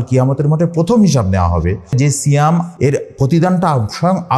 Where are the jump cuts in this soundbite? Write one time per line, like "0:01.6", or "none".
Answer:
0:01.9
0:02.7